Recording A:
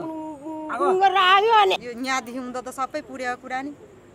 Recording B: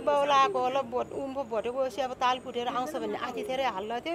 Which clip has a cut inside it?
A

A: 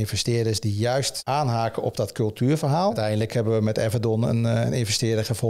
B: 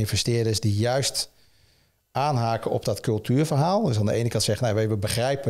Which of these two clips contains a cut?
A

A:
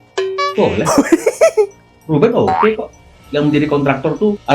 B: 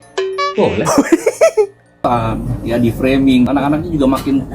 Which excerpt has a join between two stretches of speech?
B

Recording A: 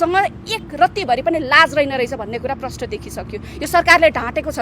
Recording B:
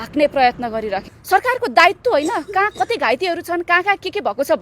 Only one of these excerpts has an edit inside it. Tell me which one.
B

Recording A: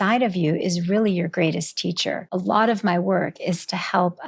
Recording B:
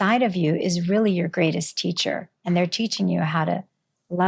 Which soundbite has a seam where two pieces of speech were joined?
A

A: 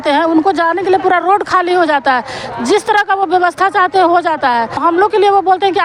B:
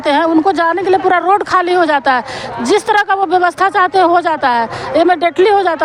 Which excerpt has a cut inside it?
A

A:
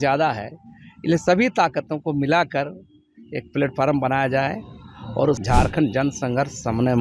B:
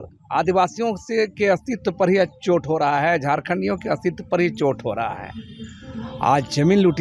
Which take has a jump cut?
A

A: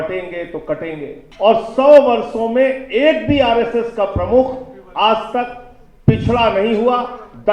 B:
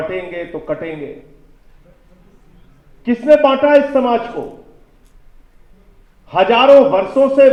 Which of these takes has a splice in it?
A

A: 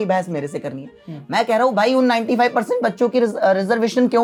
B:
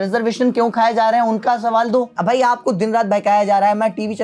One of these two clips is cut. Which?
B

